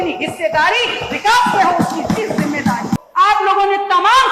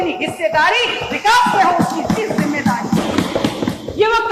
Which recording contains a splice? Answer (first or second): first